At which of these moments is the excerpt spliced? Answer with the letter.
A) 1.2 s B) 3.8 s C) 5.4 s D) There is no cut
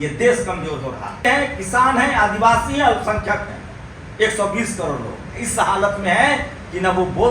A